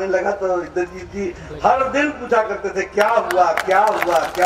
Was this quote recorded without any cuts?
yes; 0 cuts

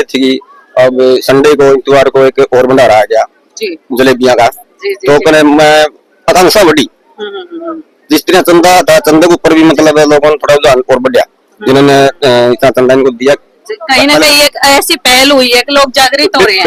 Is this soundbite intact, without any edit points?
yes; 0 cuts

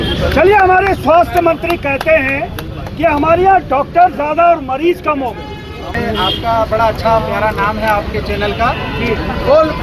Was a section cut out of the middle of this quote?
yes; 1 cut; at 5.9 s

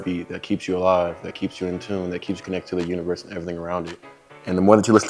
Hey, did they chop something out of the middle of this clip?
no; 0 cuts

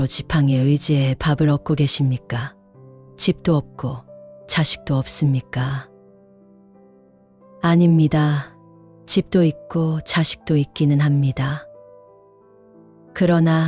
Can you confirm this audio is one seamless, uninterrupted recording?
yes; 0 cuts

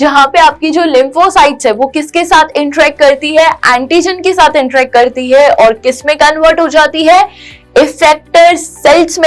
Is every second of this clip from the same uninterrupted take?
yes; 0 cuts

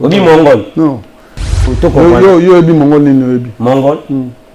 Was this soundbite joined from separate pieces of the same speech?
yes; 1 cut; at 1.7 s

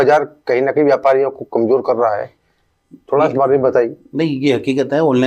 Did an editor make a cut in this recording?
no; 0 cuts

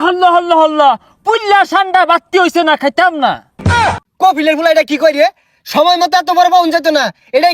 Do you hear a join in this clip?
yes; 1 cut; at 3.7 s

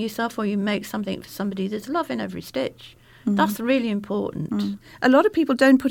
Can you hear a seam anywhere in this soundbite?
yes; 1 cut; at 4.8 s

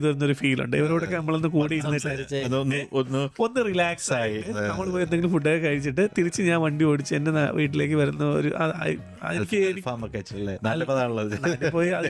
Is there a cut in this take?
no; 0 cuts

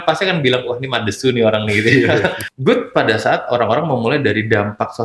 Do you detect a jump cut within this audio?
yes; 1 cut; at 2.5 s

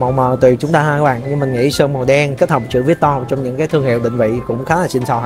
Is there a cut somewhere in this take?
no; 0 cuts

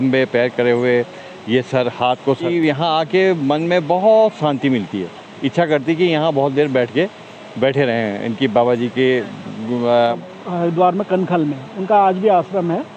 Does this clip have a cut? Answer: yes; 2 cuts; at 2.5 s, 10.2 s

